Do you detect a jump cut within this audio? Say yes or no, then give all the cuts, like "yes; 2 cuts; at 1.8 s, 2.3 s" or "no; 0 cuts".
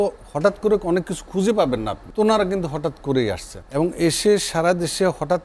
yes; 2 cuts; at 2.0 s, 3.5 s